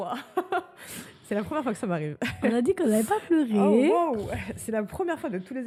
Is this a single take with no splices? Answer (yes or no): yes